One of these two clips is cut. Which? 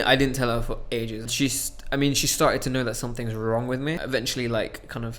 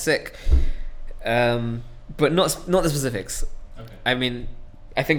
first; 2 cuts; at 1.3 s, 4.0 s

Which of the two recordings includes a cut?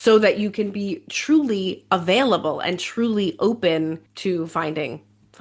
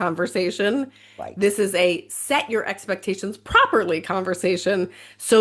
first; 1 cut; at 4.1 s

